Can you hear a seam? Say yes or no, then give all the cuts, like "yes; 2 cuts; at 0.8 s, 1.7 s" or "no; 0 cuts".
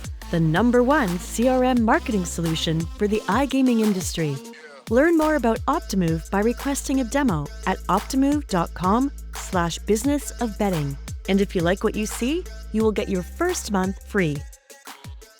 yes; 1 cut; at 14.5 s